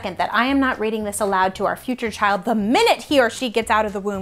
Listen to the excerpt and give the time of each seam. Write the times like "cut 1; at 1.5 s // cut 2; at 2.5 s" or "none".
none